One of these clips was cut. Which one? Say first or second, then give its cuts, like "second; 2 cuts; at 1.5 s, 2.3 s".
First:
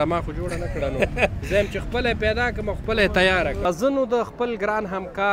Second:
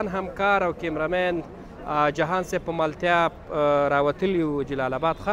first; 1 cut; at 3.7 s